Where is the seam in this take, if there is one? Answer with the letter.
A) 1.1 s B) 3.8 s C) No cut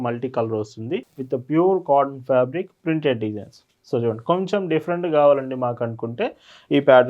A